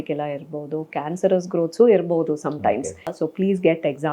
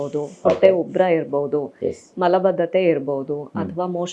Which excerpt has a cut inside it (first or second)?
first